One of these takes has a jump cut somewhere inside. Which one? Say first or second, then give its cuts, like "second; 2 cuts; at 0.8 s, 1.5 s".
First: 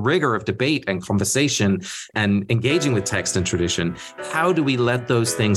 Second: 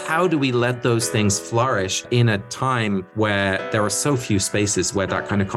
first; 1 cut; at 2.1 s